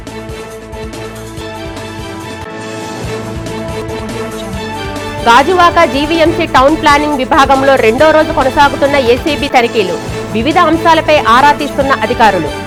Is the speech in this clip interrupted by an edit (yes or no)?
no